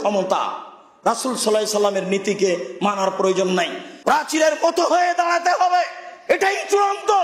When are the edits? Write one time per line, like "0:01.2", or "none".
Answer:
0:03.8